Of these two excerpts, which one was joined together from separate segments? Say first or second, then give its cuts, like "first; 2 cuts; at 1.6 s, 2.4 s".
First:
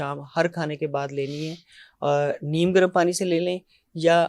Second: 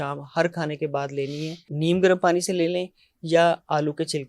second; 1 cut; at 1.7 s